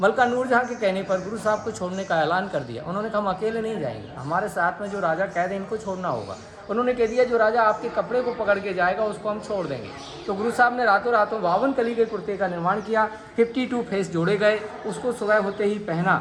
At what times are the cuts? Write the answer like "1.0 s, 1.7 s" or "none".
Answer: none